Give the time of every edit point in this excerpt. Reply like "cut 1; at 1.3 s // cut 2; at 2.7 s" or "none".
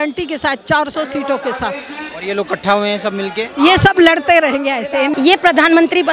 cut 1; at 5.1 s